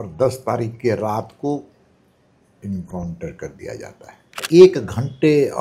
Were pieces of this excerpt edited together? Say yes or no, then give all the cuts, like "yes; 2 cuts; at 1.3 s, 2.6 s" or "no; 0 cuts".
yes; 1 cut; at 4.4 s